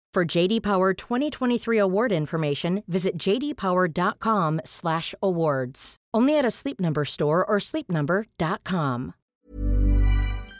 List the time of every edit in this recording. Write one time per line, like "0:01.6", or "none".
0:09.2